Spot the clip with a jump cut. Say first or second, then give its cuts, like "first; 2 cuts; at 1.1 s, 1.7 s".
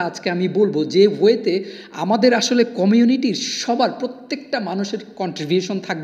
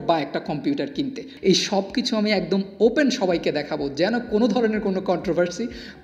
second; 1 cut; at 1.3 s